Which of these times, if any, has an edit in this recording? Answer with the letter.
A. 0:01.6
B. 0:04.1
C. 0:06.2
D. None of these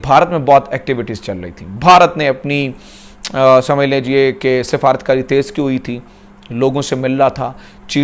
D